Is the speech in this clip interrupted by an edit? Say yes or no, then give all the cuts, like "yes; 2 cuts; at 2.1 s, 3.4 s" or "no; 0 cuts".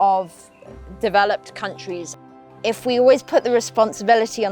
yes; 1 cut; at 2.2 s